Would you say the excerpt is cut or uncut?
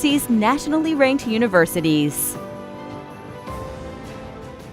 cut